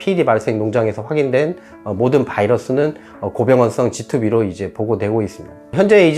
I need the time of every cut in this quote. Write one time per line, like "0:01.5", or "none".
none